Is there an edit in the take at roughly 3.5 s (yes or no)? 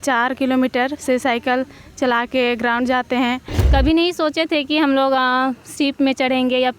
yes